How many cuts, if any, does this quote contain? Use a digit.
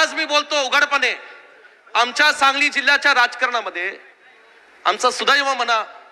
0